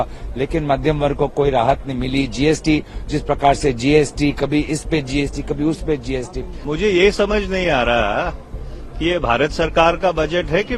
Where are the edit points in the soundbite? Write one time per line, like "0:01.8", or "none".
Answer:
0:06.5